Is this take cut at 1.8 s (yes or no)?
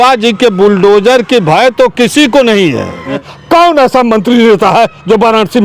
no